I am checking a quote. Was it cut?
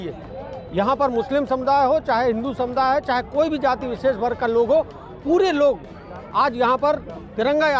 no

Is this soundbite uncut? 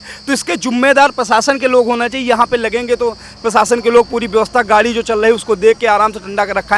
yes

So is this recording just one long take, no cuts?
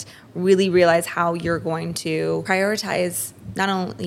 no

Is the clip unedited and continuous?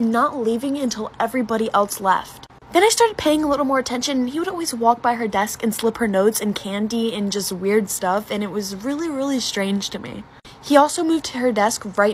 yes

